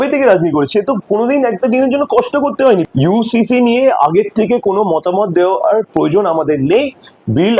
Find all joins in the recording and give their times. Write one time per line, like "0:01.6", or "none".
0:02.9